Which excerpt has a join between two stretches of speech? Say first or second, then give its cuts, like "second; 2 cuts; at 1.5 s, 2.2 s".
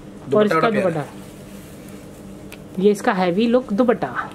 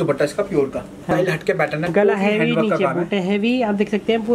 second; 1 cut; at 1.1 s